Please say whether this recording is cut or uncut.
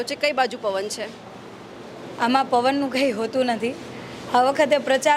uncut